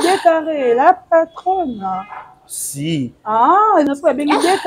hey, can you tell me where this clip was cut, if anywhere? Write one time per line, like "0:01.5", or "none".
0:03.7